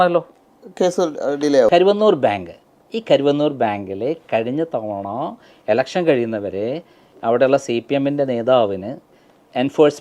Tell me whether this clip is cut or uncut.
cut